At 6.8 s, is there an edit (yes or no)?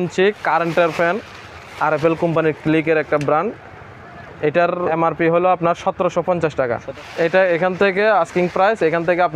yes